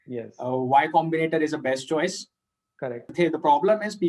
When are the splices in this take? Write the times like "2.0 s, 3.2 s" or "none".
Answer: none